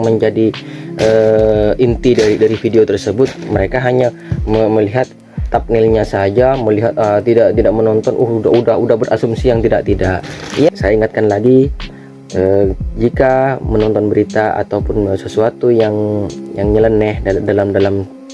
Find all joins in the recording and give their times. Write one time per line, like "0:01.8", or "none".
0:10.7